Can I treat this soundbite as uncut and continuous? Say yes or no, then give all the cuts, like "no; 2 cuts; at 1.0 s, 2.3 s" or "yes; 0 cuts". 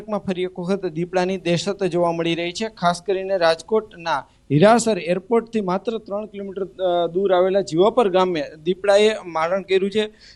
yes; 0 cuts